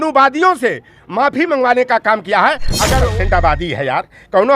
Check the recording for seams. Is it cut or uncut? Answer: cut